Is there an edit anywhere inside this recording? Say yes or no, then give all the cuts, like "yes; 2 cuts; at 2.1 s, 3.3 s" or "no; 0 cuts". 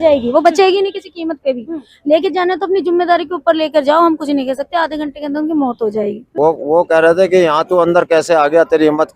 yes; 1 cut; at 6.2 s